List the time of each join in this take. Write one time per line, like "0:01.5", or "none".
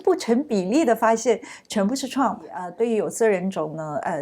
0:02.6